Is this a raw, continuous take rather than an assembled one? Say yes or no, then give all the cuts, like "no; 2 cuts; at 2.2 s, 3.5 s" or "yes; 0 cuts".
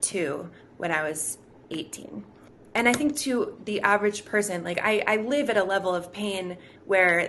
no; 1 cut; at 2.5 s